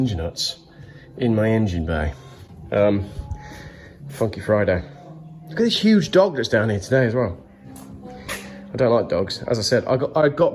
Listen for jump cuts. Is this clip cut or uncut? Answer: uncut